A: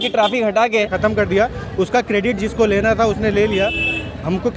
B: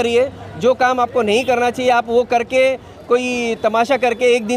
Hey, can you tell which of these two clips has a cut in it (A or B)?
A